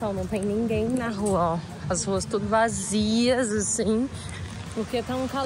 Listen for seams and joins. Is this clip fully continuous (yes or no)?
yes